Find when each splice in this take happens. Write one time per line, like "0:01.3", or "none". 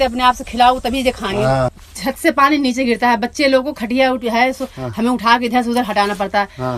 0:01.7

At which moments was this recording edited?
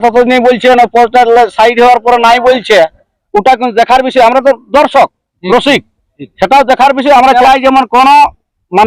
0:07.3

